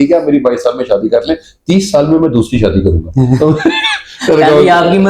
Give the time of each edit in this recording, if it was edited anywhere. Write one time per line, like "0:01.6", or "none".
none